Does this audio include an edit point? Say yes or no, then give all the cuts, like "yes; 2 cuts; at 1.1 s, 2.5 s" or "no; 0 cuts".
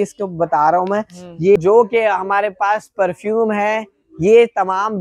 yes; 1 cut; at 1.6 s